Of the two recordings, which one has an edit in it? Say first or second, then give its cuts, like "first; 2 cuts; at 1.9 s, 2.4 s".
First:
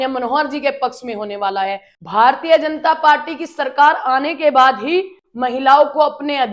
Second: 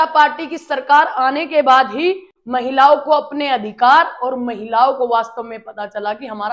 first; 1 cut; at 1.9 s